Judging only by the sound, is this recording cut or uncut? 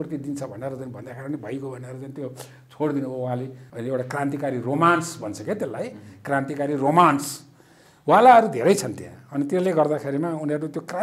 cut